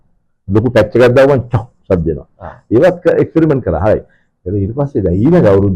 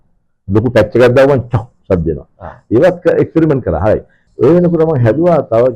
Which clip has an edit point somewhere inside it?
second; 1 cut; at 4.2 s

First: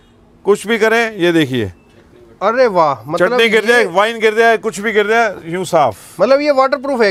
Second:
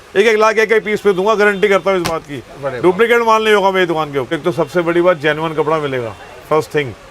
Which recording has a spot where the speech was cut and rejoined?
second; 1 cut; at 4.4 s

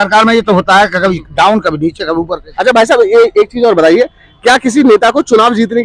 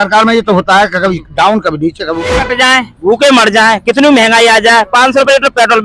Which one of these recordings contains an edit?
second; 1 cut; at 2.3 s

